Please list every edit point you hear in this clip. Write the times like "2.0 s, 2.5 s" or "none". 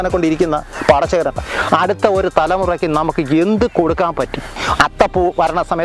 4.5 s